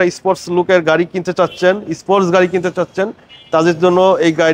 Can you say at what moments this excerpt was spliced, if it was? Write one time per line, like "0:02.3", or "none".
none